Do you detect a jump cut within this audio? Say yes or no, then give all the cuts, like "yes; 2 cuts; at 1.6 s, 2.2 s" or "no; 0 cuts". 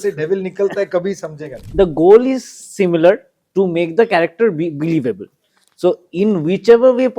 yes; 1 cut; at 1.6 s